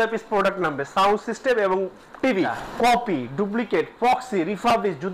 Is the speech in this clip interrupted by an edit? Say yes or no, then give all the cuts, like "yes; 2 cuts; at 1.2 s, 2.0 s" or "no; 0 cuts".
yes; 1 cut; at 2.6 s